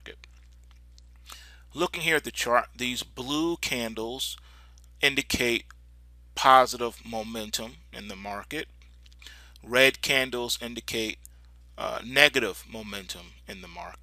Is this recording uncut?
no; 1 cut; at 9.0 s

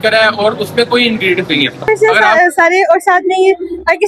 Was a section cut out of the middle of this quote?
yes; 1 cut; at 1.9 s

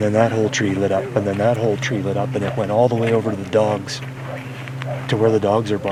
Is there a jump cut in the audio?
no; 0 cuts

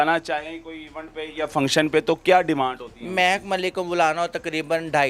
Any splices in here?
no; 0 cuts

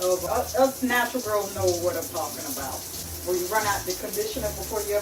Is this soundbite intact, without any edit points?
yes; 0 cuts

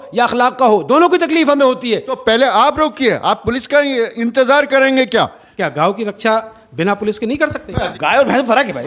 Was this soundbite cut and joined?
yes; 3 cuts; at 2.1 s, 5.4 s, 7.9 s

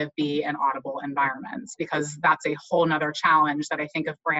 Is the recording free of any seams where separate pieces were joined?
yes; 0 cuts

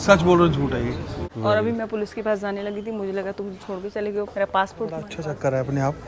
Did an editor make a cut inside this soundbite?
yes; 2 cuts; at 1.2 s, 5.0 s

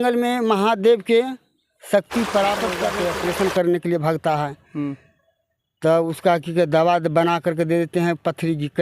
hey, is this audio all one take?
no; 1 cut; at 2.9 s

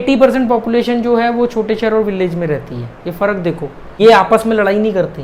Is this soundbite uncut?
no; 1 cut; at 3.8 s

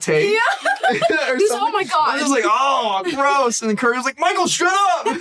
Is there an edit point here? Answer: no; 0 cuts

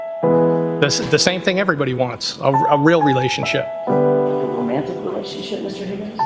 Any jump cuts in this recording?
no; 0 cuts

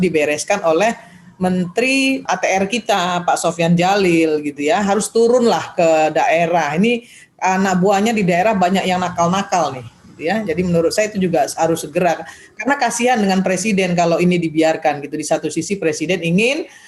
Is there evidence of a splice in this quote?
yes; 1 cut; at 2.2 s

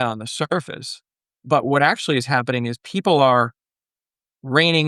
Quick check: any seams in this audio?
no; 0 cuts

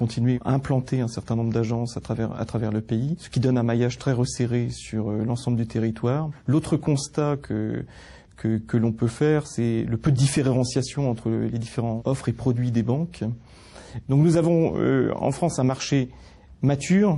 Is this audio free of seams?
yes; 0 cuts

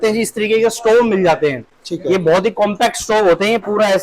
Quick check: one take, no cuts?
yes; 0 cuts

